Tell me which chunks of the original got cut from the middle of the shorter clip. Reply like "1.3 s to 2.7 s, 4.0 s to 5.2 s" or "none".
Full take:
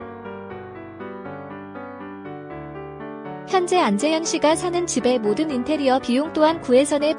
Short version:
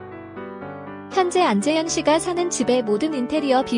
1.8 s to 3.5 s